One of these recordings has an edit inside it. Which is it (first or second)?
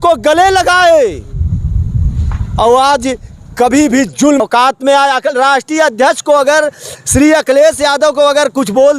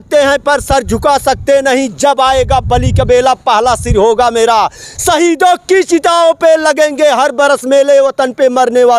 first